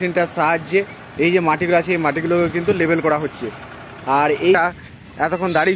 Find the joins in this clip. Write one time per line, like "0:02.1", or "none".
0:04.6